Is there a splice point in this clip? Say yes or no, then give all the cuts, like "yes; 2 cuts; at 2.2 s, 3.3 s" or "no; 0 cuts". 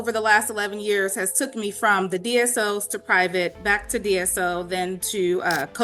no; 0 cuts